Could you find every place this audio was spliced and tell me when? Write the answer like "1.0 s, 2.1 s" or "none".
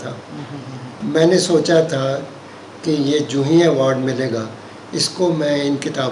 1.0 s